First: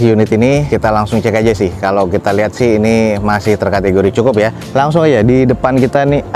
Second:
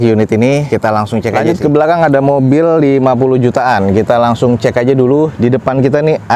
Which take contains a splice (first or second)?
second